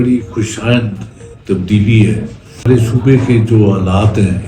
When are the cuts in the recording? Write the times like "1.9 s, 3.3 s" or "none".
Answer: 2.7 s